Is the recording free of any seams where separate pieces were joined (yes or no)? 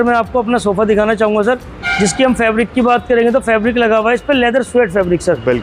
yes